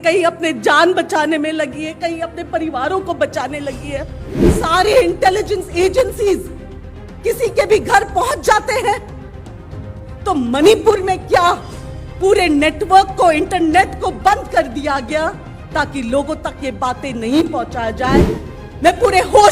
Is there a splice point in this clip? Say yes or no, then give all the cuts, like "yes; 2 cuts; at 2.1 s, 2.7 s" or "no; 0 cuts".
yes; 2 cuts; at 4.5 s, 18.4 s